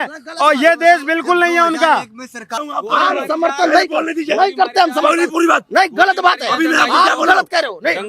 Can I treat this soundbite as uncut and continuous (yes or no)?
no